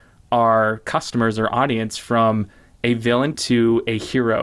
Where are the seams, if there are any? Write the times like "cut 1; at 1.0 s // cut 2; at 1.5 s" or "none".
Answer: cut 1; at 3.3 s